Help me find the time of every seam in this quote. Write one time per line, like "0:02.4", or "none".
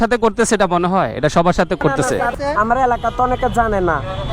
none